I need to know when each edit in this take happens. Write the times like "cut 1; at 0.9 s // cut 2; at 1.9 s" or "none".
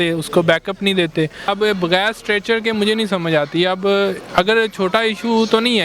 cut 1; at 1.4 s